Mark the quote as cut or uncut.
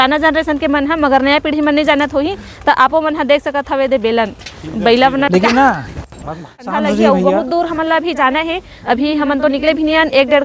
cut